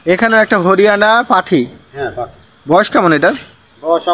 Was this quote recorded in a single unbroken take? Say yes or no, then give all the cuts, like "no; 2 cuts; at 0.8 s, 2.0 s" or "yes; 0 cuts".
yes; 0 cuts